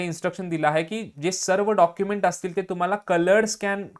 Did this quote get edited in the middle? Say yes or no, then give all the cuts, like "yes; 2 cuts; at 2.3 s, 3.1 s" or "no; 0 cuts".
no; 0 cuts